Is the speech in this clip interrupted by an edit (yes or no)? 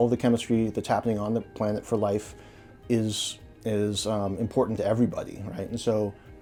no